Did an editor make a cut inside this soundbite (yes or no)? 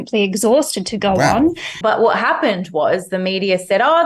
yes